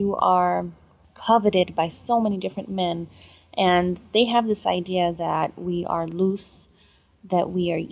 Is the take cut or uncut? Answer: uncut